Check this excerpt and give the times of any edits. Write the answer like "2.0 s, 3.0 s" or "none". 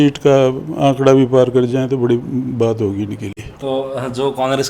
none